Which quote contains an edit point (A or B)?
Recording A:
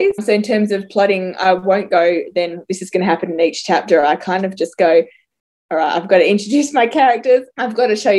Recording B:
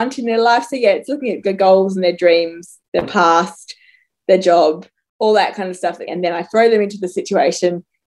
B